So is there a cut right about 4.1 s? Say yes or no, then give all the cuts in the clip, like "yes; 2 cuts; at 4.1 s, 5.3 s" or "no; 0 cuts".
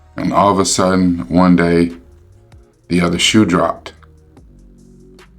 yes; 1 cut; at 4.1 s